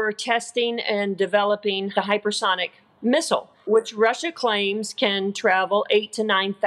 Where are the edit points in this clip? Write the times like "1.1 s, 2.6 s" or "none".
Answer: 1.9 s, 3.5 s